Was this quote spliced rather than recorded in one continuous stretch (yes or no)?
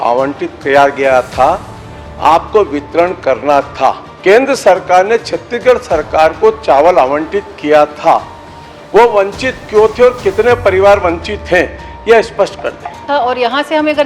yes